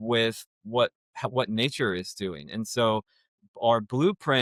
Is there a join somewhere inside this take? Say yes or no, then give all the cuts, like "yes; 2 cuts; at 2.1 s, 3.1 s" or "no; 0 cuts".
no; 0 cuts